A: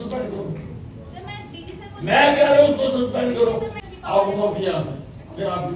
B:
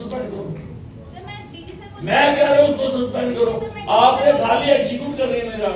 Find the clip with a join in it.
A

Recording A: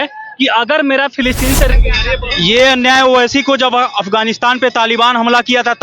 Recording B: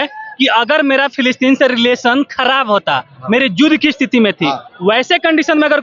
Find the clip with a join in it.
A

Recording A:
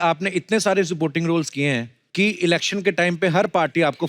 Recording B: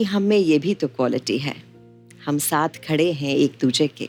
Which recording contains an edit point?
A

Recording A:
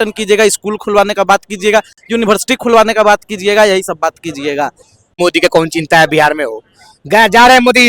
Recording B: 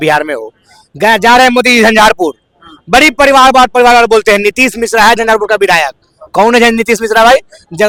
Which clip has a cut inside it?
A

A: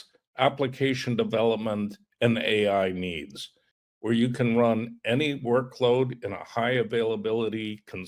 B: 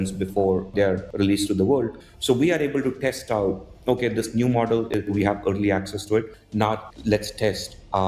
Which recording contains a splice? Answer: B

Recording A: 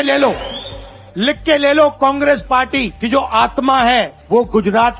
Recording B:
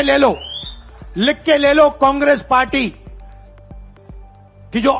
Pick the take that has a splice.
A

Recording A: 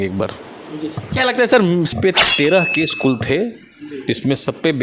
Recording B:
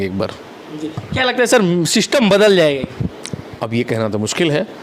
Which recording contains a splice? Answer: A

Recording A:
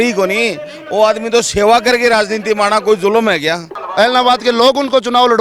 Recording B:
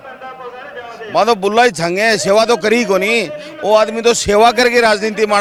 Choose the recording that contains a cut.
A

